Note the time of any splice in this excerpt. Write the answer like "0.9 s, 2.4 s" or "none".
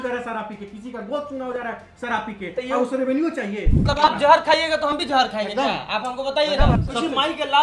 3.8 s, 6.8 s